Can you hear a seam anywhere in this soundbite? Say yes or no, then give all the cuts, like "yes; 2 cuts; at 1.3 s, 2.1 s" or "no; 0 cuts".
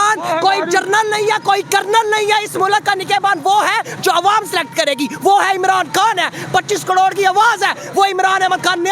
no; 0 cuts